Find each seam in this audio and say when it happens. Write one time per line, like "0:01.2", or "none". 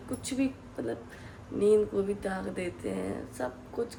none